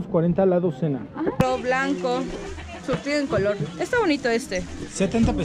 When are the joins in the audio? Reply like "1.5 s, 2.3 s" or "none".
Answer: 1.4 s